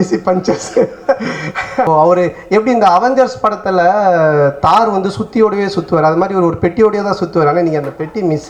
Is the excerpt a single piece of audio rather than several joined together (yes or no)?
no